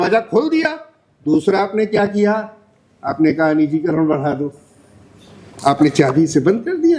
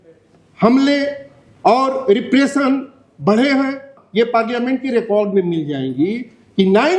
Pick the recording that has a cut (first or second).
second